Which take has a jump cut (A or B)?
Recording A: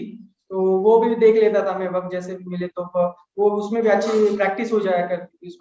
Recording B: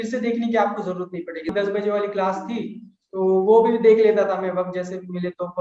B